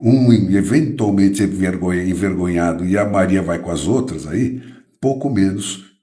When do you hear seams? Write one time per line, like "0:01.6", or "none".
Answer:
0:04.8